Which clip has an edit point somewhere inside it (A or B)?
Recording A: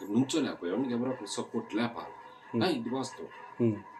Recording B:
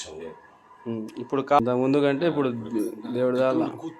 B